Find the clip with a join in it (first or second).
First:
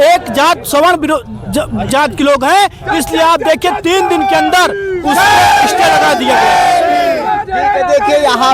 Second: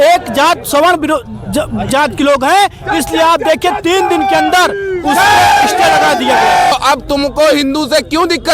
second